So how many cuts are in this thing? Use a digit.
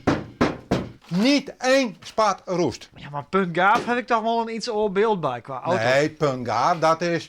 1